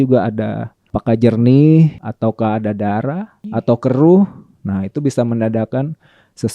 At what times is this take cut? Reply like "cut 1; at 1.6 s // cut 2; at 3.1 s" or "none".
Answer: cut 1; at 0.9 s // cut 2; at 2.0 s // cut 3; at 3.3 s